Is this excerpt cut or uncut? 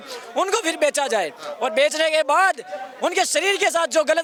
uncut